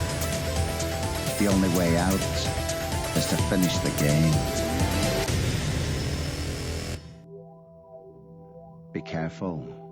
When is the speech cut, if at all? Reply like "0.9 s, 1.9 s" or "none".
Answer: none